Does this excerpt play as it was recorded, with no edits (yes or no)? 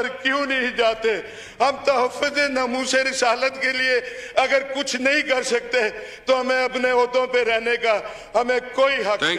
yes